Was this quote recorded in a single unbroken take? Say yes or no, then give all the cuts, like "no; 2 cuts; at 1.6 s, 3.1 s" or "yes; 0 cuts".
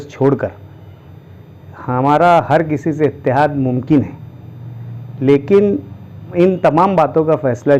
no; 1 cut; at 6.3 s